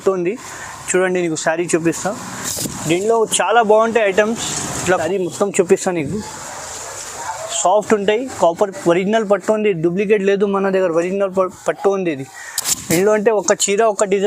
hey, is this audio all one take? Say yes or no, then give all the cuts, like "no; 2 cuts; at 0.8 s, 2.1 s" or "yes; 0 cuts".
no; 1 cut; at 4.8 s